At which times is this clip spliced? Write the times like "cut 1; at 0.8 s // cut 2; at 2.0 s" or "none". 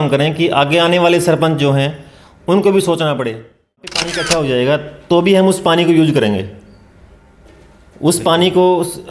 cut 1; at 4.0 s